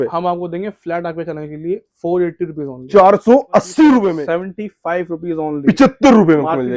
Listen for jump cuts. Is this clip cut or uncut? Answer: cut